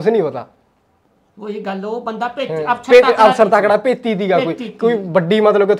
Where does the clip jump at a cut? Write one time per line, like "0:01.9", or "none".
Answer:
none